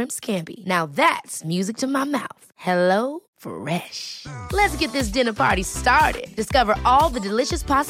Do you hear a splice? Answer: no; 0 cuts

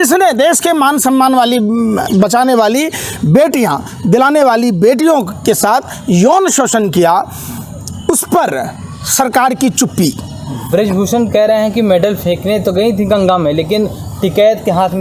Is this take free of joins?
yes; 0 cuts

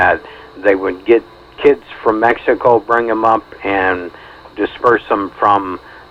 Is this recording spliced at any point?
no; 0 cuts

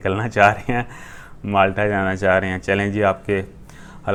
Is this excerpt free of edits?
yes; 0 cuts

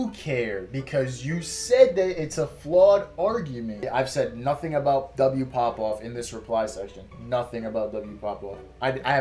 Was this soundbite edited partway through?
yes; 1 cut; at 3.9 s

